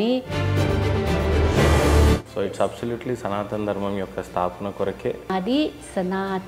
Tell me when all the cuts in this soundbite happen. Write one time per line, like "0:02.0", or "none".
none